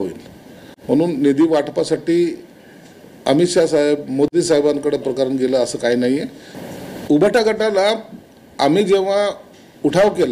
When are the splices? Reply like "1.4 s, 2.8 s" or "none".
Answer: 6.4 s

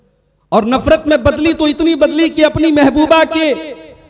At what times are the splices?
none

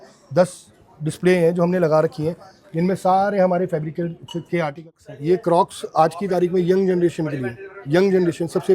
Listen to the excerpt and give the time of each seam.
4.8 s

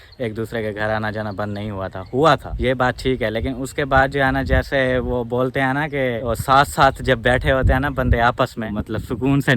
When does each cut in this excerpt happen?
none

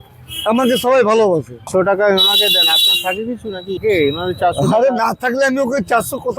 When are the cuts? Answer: 1.7 s, 3.8 s

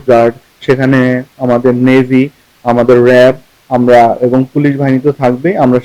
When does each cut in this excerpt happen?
none

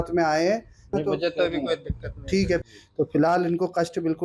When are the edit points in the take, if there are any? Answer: 0.9 s, 2.7 s

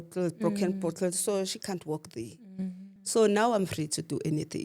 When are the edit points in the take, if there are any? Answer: 2.9 s

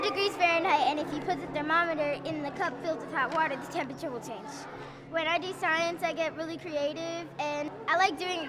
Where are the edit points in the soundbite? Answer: none

